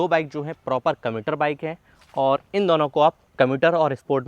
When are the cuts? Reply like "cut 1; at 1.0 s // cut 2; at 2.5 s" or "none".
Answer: cut 1; at 3.2 s

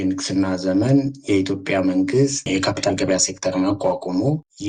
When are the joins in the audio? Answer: none

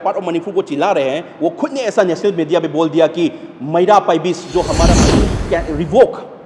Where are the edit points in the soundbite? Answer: cut 1; at 5.0 s

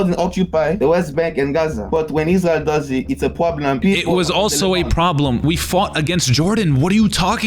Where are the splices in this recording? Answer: cut 1; at 0.8 s // cut 2; at 1.8 s // cut 3; at 3.8 s // cut 4; at 5.4 s

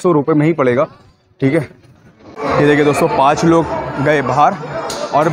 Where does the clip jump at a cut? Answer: cut 1; at 2.4 s

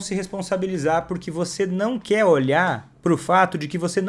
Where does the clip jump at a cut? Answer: cut 1; at 2.9 s

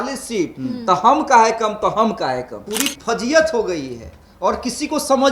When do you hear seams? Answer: cut 1; at 2.6 s

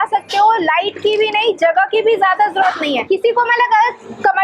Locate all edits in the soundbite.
cut 1; at 3.0 s

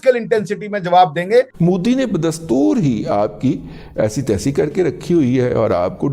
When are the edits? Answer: cut 1; at 1.5 s

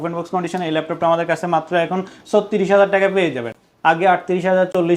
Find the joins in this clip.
none

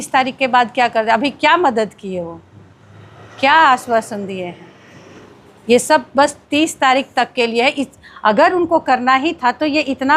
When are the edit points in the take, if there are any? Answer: none

